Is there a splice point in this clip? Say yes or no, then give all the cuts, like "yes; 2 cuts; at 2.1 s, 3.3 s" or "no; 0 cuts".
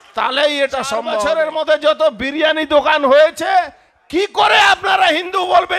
yes; 1 cut; at 1.2 s